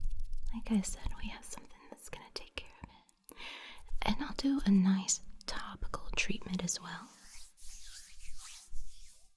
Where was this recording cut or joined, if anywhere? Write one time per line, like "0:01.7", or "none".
none